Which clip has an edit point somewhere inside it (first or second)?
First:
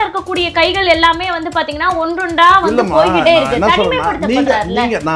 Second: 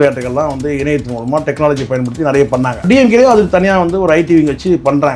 second